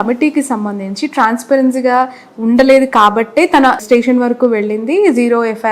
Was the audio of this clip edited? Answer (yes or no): no